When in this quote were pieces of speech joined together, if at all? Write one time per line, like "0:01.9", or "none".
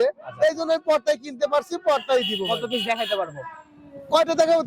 none